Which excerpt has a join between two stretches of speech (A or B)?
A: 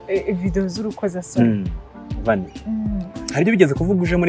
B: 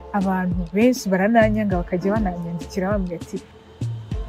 A